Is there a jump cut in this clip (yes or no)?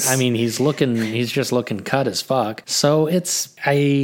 yes